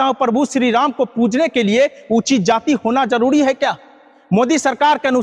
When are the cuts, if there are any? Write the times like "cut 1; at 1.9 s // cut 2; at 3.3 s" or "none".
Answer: none